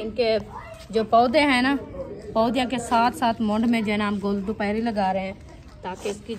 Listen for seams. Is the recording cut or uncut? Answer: uncut